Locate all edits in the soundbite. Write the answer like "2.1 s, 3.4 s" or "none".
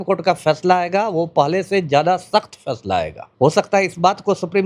3.2 s